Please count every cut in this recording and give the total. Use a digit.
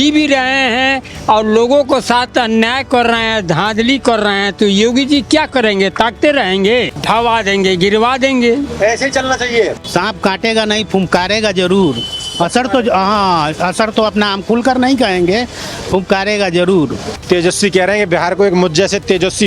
3